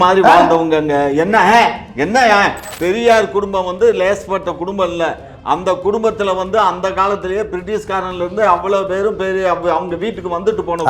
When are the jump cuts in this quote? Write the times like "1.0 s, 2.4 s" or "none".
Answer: 2.6 s